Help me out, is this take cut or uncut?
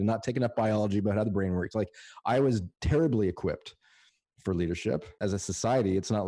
cut